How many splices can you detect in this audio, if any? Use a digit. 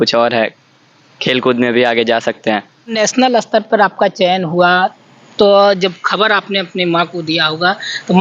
1